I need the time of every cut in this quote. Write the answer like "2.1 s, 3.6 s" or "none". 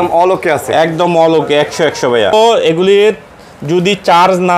2.3 s